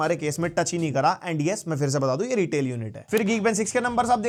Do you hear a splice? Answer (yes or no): no